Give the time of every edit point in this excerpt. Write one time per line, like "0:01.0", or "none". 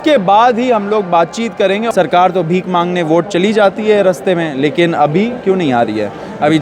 0:01.8